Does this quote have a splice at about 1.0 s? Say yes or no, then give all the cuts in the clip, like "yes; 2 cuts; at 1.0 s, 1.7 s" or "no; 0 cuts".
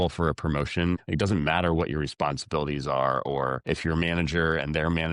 yes; 2 cuts; at 1.0 s, 3.6 s